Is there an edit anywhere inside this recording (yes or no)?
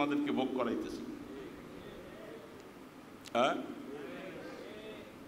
no